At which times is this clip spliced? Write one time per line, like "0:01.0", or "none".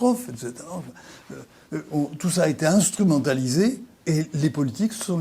0:03.9